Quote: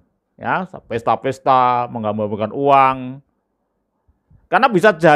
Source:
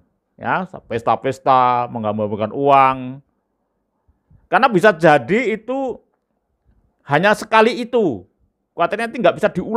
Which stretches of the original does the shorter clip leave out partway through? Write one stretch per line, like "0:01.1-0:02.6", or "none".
none